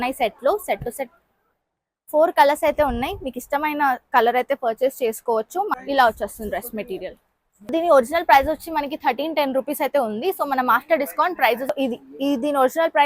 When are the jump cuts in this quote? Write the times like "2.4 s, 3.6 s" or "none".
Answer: 5.7 s, 11.7 s